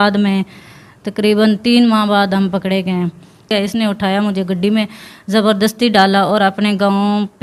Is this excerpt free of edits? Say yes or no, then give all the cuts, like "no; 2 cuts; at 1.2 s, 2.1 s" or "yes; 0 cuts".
no; 1 cut; at 3.5 s